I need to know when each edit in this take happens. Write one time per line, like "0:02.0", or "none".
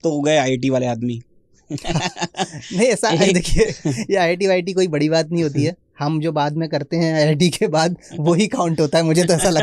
none